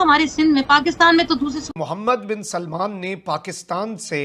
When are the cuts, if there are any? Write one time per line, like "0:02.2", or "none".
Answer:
0:01.8